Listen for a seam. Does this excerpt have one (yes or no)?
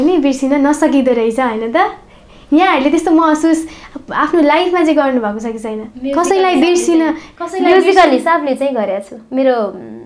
no